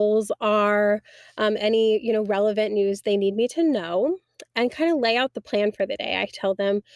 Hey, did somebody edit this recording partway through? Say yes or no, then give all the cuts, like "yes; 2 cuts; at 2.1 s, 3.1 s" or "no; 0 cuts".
no; 0 cuts